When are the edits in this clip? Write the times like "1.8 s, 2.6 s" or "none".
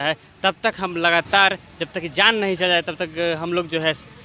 none